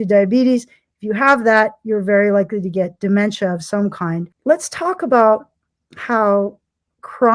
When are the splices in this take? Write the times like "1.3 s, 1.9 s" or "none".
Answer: 4.3 s